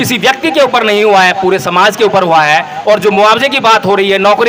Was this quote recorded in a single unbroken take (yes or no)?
yes